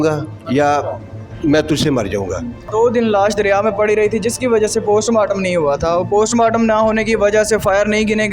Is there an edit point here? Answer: yes; 1 cut; at 2.7 s

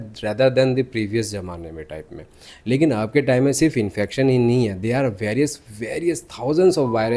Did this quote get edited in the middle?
no; 0 cuts

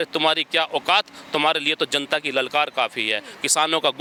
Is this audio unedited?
yes; 0 cuts

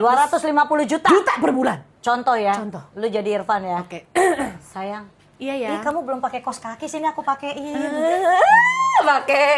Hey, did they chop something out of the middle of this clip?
no; 0 cuts

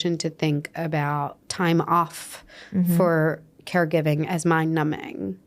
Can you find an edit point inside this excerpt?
yes; 1 cut; at 1.4 s

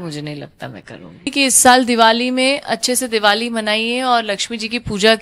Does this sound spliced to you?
yes; 1 cut; at 1.3 s

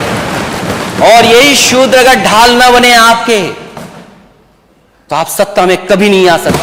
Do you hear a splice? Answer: no; 0 cuts

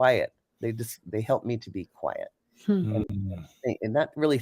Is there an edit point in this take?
no; 0 cuts

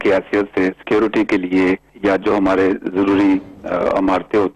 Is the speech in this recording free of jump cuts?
no; 1 cut; at 1.9 s

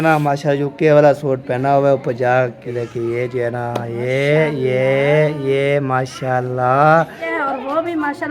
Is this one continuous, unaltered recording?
no; 2 cuts; at 2.7 s, 7.3 s

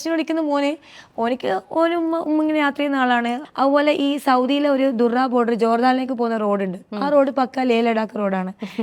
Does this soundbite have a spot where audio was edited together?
yes; 1 cut; at 3.4 s

